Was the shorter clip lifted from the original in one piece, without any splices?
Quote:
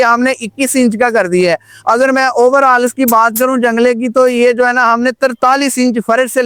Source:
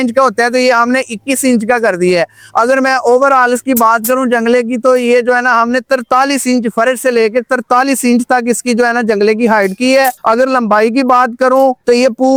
yes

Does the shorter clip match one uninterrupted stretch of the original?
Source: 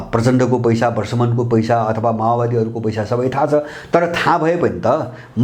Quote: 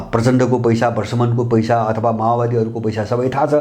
yes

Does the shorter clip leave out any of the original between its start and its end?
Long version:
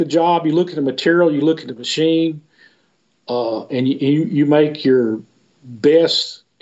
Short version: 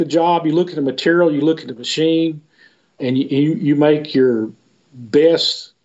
yes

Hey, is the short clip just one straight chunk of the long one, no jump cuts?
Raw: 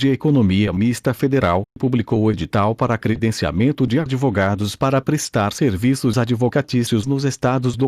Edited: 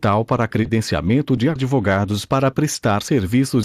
yes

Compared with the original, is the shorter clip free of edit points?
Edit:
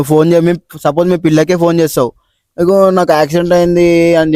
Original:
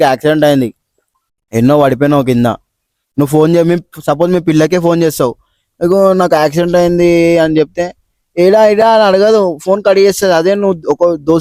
yes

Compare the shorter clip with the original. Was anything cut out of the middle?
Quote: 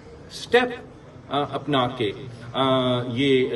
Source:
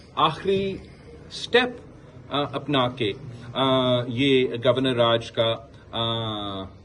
no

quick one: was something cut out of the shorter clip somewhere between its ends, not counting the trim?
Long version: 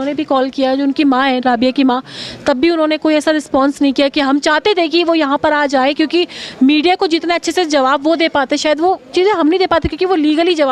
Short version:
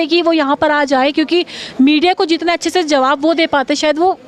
no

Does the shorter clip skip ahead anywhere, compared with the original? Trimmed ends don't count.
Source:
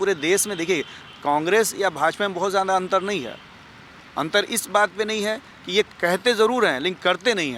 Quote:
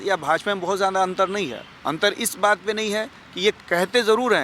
yes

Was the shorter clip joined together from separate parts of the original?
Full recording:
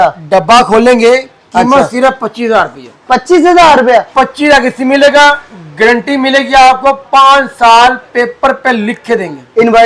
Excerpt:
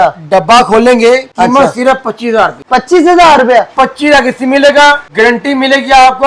yes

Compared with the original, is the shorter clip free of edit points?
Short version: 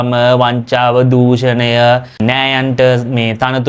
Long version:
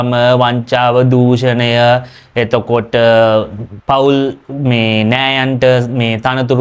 no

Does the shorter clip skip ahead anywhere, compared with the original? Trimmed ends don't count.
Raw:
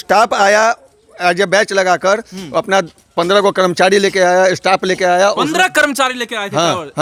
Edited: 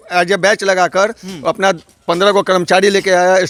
no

